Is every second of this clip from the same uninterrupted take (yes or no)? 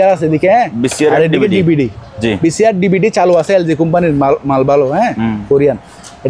yes